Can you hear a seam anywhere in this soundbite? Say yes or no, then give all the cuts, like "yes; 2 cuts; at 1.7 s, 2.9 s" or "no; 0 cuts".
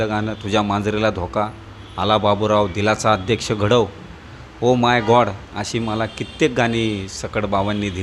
no; 0 cuts